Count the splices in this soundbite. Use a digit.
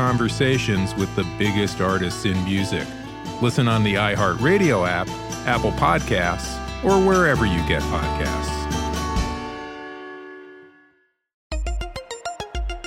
1